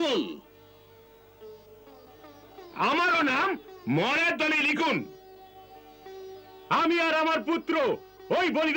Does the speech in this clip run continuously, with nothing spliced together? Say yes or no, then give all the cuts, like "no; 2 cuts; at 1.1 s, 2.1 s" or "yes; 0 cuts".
yes; 0 cuts